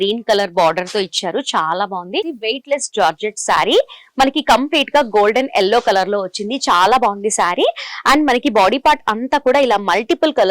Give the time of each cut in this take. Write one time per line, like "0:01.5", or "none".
0:02.3